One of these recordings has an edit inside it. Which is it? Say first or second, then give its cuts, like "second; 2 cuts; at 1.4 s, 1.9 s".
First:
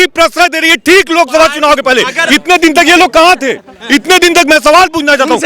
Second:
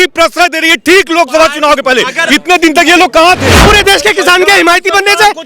second; 1 cut; at 3.6 s